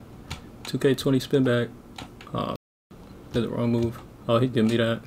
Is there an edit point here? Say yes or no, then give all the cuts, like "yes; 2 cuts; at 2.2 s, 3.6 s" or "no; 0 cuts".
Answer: no; 0 cuts